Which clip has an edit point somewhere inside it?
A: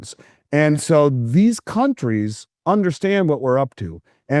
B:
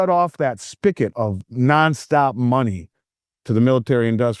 B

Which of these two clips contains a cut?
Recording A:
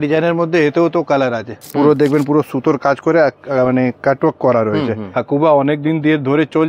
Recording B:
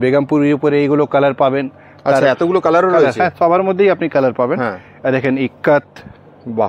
A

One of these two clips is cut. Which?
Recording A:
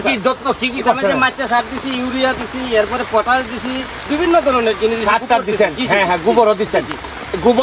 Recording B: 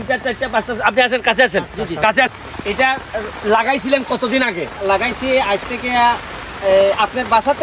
B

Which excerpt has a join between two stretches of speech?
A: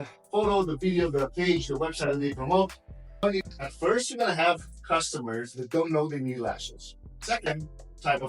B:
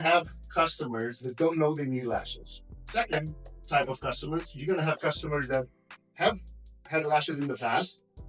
A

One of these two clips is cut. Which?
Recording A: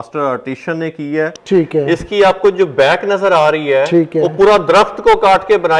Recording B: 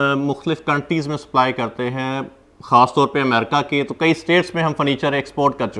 A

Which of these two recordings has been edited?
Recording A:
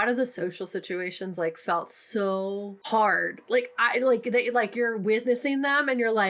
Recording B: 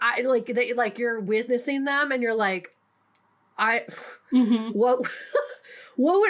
A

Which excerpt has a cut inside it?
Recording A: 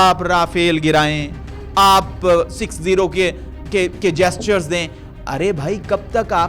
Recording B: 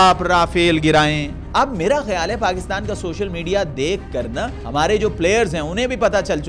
B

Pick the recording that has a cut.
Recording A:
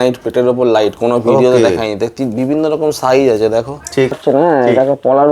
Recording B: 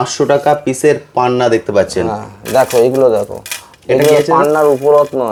A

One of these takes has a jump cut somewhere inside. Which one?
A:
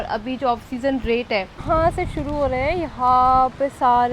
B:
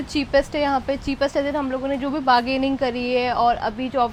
A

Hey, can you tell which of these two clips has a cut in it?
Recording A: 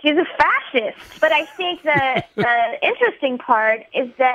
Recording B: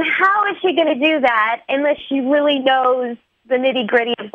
A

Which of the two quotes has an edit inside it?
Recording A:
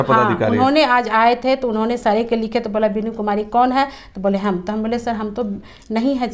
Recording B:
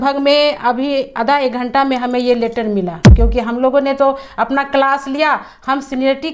B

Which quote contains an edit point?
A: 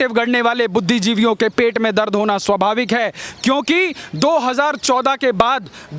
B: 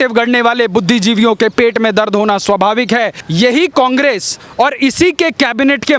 B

